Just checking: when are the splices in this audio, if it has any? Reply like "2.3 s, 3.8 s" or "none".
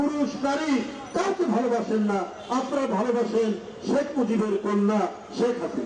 none